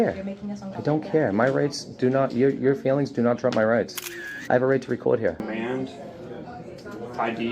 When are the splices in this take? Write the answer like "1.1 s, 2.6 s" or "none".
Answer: 5.4 s